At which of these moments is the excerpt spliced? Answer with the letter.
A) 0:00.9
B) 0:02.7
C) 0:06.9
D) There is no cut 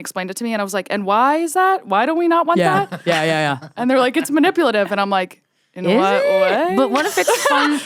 D